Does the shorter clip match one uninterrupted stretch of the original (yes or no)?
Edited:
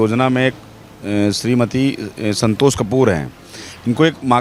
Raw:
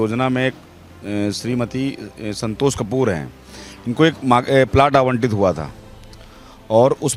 yes